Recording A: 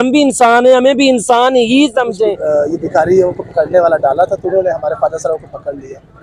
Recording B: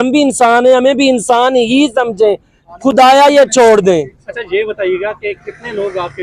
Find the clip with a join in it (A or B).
A